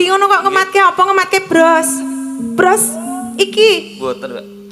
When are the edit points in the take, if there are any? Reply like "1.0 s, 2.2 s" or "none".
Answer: none